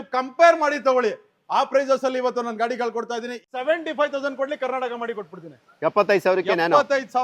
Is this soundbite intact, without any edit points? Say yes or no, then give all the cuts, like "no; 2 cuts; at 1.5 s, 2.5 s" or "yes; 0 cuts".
no; 1 cut; at 3.4 s